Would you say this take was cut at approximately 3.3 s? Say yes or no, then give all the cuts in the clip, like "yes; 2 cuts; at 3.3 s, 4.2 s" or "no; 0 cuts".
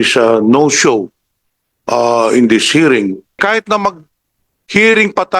yes; 1 cut; at 3.3 s